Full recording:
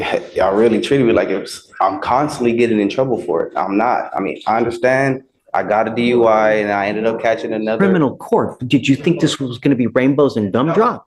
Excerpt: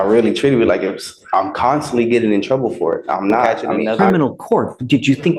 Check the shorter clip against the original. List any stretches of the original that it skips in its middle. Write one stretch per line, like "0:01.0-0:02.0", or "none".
0:04.1-0:07.4

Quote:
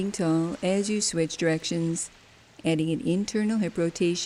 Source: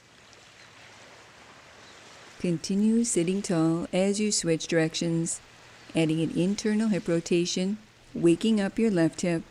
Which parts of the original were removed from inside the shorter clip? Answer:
none

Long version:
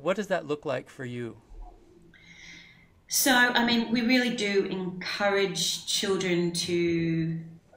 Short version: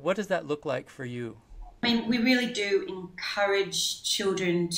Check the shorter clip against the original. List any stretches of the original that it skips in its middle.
0:01.8-0:03.7

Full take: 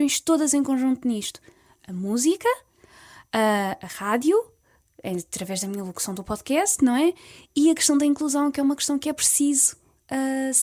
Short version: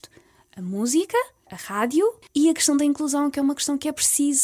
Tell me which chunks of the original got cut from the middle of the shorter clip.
0:03.3-0:07.2

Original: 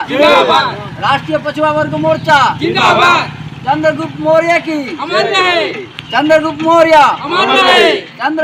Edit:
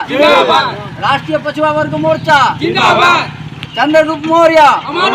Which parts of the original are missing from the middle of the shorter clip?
0:03.5-0:05.8

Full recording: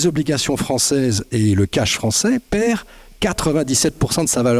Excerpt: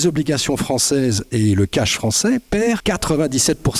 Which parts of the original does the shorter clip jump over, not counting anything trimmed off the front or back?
0:02.8-0:03.2

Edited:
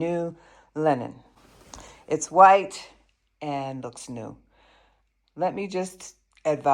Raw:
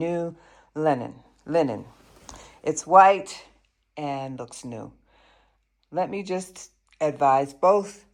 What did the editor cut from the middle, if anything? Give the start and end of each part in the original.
0:01.3-0:01.9

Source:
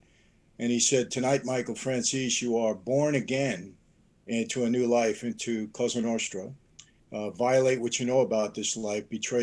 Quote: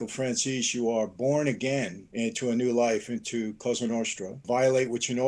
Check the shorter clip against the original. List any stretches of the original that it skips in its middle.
0:03.7-0:04.1
0:06.6-0:07.3

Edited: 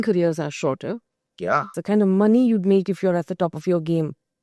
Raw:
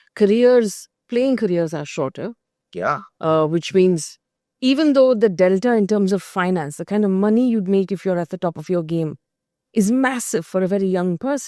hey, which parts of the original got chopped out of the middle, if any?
0:03.1-0:06.8

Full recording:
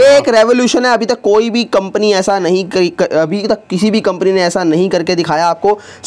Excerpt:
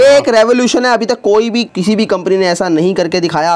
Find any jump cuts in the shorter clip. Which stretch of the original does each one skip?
0:01.7-0:03.6

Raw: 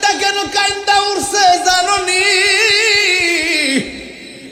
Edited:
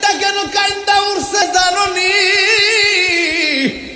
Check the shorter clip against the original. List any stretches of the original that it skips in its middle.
0:01.4-0:01.5

